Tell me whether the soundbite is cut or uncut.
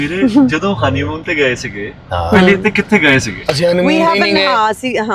uncut